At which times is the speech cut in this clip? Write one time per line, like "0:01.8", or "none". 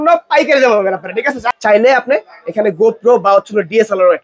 0:01.5